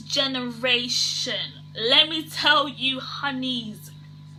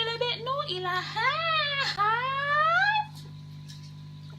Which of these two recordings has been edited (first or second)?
second